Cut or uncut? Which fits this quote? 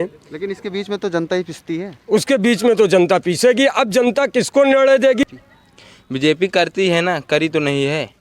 cut